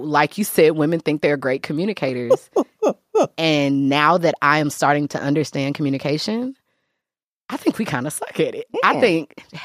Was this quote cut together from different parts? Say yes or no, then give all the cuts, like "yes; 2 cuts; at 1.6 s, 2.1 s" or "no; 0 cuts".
no; 0 cuts